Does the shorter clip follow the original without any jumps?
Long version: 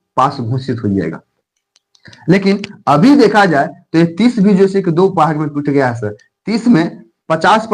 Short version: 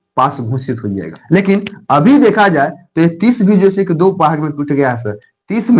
no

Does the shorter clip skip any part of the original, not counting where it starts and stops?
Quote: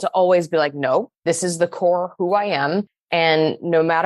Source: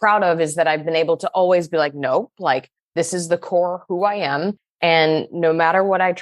yes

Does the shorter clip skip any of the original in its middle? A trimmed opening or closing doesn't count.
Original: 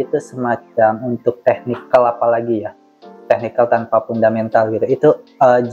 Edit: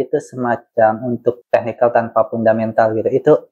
yes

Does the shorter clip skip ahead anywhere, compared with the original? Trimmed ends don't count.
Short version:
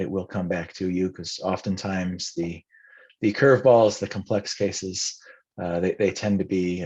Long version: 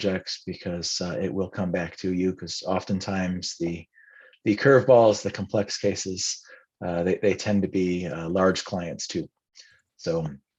no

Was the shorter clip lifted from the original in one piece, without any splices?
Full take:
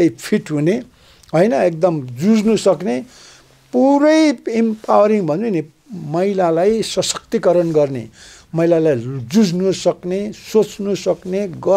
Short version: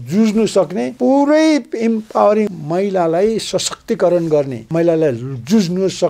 no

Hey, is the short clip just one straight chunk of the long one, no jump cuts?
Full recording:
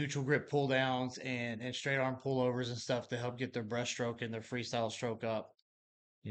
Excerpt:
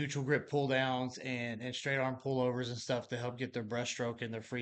yes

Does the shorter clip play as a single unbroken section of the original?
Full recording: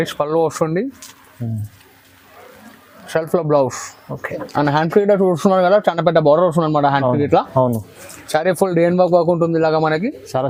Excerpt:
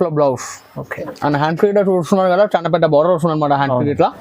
yes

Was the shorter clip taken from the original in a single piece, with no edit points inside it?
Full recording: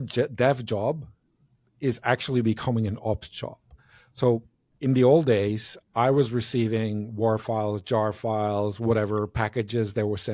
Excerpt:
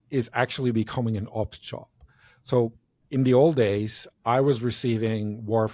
yes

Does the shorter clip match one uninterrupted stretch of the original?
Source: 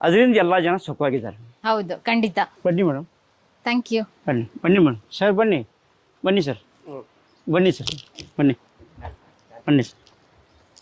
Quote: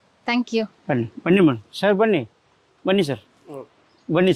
yes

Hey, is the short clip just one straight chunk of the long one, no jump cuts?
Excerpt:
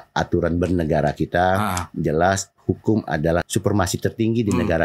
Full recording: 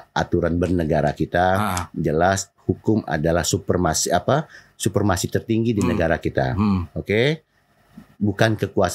no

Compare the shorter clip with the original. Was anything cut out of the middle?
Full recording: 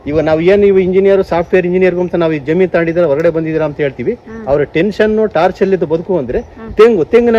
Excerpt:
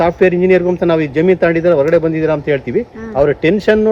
no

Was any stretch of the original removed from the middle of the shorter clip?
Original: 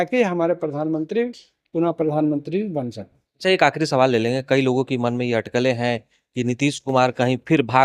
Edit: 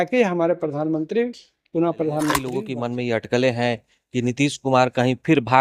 yes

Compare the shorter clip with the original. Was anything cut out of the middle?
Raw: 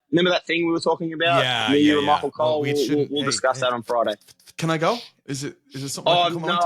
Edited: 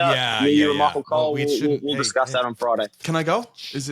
yes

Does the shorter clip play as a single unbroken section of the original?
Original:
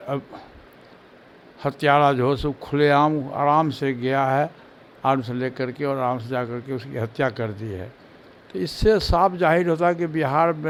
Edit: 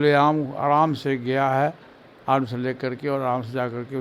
yes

